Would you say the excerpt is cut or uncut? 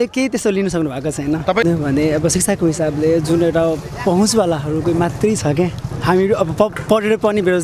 cut